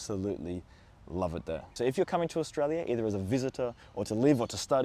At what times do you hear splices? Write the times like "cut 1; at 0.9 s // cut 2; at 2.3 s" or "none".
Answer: cut 1; at 1.7 s